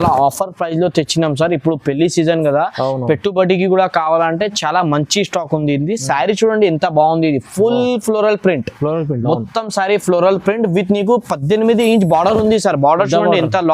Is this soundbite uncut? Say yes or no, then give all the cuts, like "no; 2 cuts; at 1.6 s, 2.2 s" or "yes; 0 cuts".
yes; 0 cuts